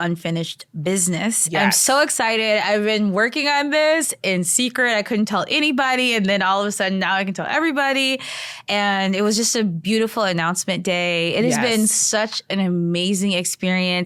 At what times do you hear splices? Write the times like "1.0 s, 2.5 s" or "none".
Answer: none